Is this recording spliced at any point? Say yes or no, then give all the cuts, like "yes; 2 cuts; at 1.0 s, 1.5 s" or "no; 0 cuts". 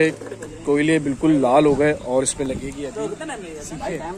no; 0 cuts